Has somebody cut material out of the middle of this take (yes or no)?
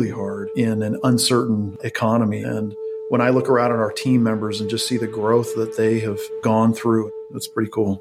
yes